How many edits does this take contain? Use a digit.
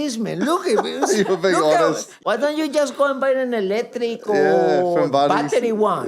1